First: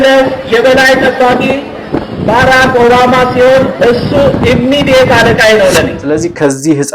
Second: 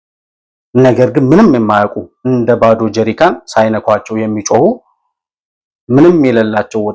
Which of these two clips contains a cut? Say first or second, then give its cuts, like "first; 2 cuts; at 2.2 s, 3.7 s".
first; 1 cut; at 6.0 s